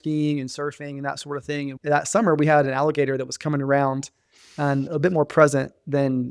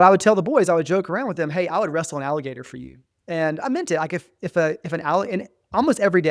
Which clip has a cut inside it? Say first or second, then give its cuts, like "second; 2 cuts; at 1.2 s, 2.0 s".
first; 1 cut; at 1.7 s